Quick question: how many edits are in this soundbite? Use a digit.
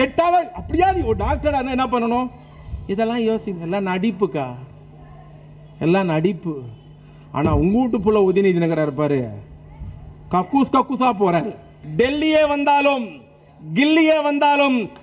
1